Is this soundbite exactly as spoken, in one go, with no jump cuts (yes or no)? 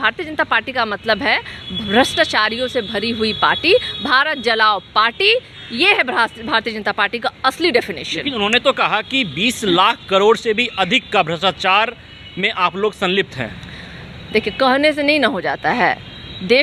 yes